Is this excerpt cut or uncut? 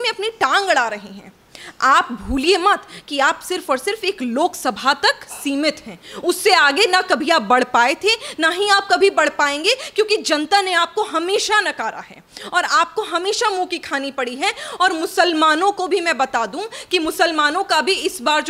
uncut